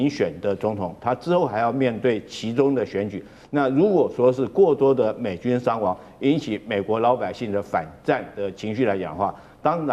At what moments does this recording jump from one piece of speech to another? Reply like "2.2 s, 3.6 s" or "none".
none

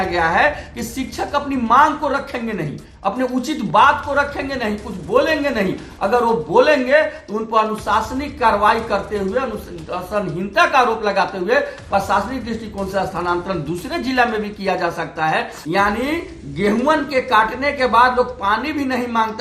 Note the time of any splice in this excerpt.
15.6 s

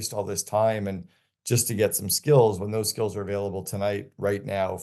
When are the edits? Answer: none

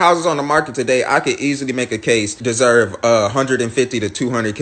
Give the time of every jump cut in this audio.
2.4 s

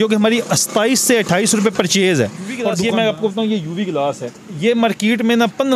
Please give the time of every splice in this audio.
2.7 s

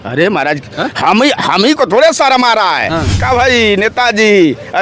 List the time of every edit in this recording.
3.2 s

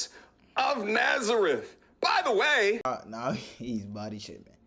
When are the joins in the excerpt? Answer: 2.9 s

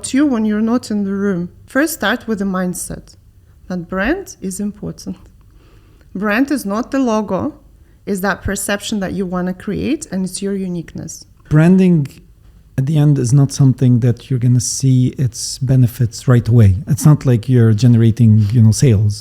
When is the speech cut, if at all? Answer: 1.5 s, 11.4 s

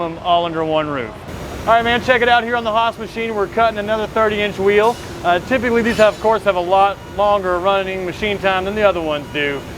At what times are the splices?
1.4 s

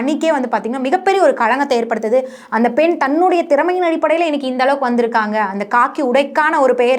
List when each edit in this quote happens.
none

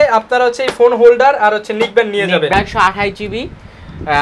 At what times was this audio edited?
2.5 s

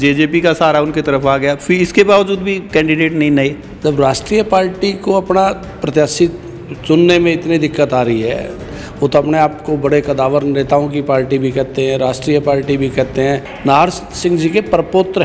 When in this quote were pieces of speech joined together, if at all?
3.7 s, 13.5 s

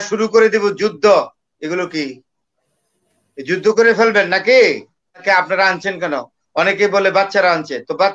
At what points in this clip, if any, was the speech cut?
5.2 s

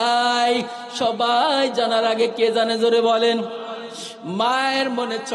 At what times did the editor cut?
3.6 s

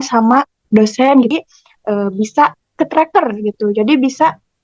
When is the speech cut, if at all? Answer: 1.3 s

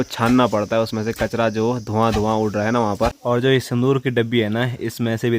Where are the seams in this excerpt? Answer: 3.2 s

